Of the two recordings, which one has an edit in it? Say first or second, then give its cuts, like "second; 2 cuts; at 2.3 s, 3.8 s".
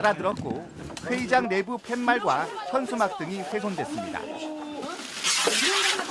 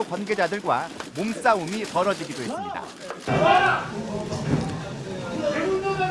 first; 1 cut; at 4.1 s